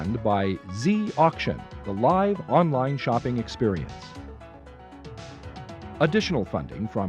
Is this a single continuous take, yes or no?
no